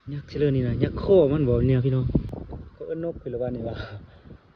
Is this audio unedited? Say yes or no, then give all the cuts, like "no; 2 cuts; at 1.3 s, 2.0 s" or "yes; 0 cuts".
no; 1 cut; at 2.3 s